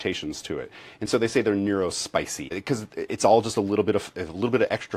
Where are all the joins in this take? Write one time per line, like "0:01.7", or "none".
0:02.6

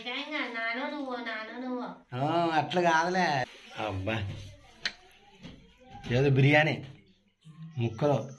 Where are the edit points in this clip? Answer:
0:03.5

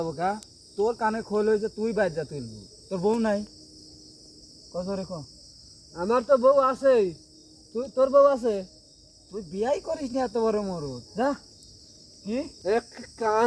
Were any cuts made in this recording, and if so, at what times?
0:12.5

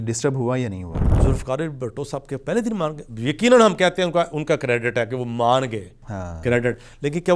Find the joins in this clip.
0:01.1

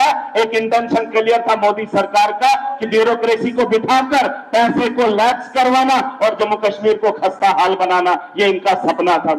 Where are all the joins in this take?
none

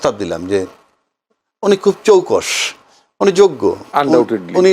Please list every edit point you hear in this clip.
none

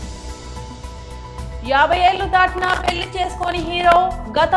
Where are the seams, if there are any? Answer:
none

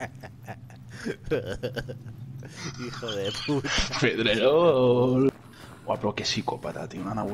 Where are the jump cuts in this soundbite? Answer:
0:05.3

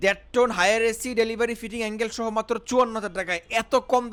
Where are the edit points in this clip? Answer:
none

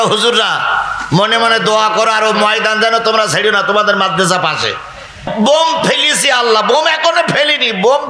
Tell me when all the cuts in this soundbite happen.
0:05.3

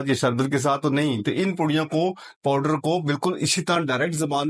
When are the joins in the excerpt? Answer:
none

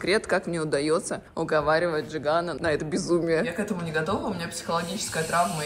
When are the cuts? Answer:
0:01.2
0:02.5
0:03.5

